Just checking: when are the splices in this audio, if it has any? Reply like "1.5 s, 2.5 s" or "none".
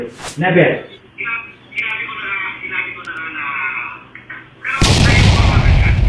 4.9 s